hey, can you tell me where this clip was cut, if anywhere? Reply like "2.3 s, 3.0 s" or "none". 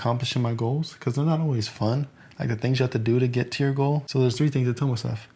4.1 s

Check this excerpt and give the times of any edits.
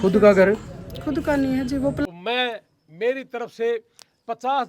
2.1 s

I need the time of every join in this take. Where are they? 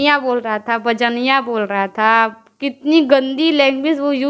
none

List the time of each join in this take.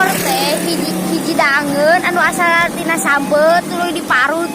none

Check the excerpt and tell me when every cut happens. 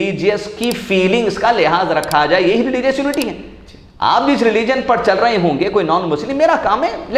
none

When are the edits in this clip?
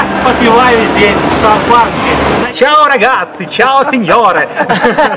2.3 s

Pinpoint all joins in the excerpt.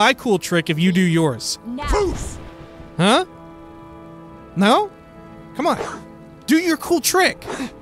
1.5 s

